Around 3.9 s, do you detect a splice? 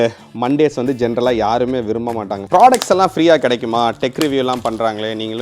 no; 1 cut; at 2.4 s

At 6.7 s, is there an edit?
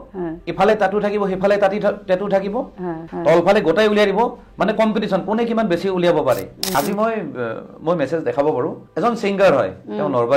yes; 3 cuts; at 3.0 s, 6.7 s, 8.8 s

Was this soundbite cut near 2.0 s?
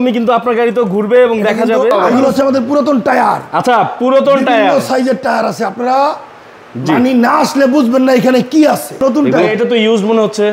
yes; 2 cuts; at 2.0 s, 9.0 s

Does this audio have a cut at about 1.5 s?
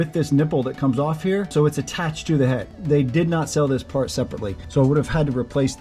yes; 3 cuts; at 1.5 s, 2.7 s, 4.6 s

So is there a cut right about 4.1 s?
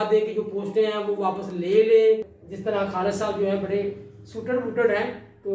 no; 1 cut; at 2.4 s

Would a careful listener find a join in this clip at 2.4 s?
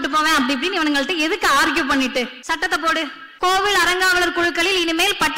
yes; 2 cuts; at 2.4 s, 3.2 s

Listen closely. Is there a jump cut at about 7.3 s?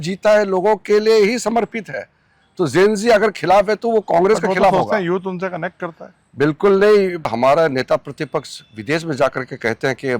yes; 1 cut; at 7.3 s

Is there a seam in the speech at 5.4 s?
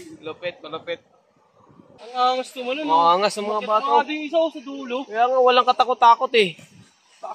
no; 1 cut; at 2.0 s

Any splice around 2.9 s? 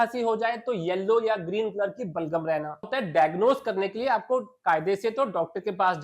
yes; 1 cut; at 2.9 s

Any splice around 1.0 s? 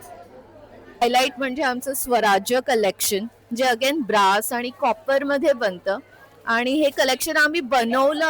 yes; 1 cut; at 1.0 s

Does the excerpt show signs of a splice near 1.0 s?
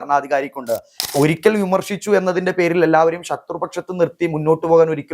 yes; 1 cut; at 1.0 s

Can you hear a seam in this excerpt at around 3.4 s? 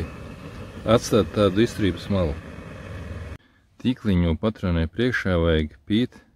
yes; 1 cut; at 3.4 s

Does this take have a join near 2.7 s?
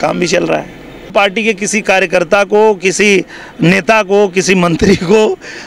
no; 1 cut; at 1.1 s

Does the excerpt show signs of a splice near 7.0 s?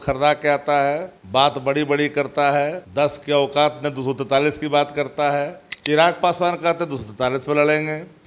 no; 3 cuts; at 1.1 s, 2.8 s, 5.7 s

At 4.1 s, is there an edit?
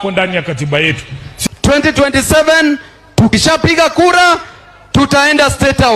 no; 1 cut; at 1.5 s

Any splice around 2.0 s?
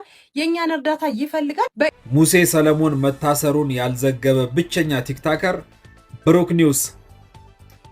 yes; 1 cut; at 2.0 s

